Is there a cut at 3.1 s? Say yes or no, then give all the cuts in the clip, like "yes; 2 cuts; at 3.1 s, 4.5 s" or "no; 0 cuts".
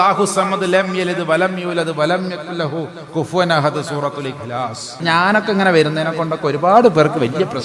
no; 1 cut; at 5.0 s